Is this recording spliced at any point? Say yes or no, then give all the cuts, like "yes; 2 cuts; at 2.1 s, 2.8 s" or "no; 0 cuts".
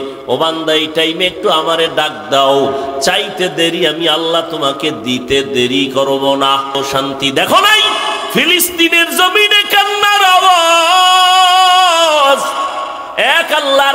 yes; 1 cut; at 6.7 s